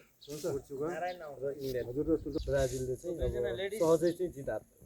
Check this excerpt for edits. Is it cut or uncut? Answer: cut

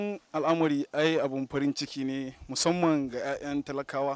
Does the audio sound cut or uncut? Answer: uncut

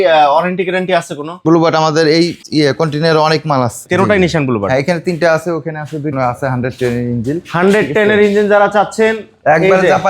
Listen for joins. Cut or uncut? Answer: cut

